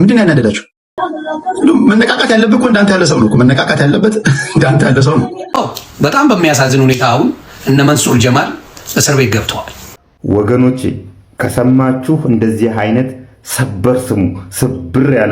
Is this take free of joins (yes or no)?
no